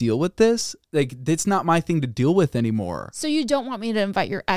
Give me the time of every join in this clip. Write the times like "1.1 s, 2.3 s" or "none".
none